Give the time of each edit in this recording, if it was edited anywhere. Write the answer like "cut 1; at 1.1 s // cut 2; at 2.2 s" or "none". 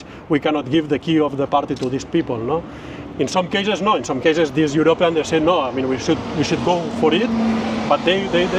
none